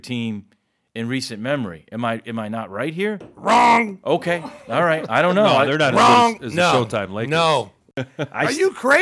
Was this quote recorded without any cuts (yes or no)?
no